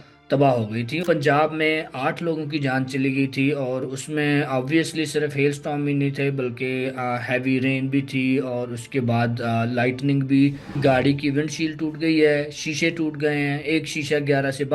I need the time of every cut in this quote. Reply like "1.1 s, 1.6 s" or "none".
1.0 s, 10.8 s